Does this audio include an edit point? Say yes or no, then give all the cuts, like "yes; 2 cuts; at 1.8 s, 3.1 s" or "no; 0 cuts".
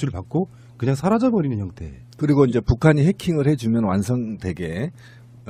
yes; 1 cut; at 2.1 s